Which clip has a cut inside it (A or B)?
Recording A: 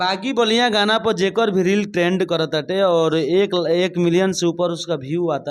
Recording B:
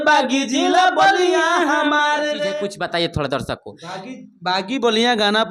B